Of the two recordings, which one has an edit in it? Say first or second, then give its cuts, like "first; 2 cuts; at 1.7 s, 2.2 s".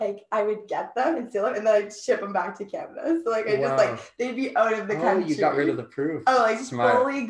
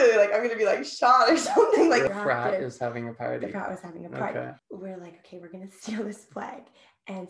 second; 2 cuts; at 2.1 s, 4.6 s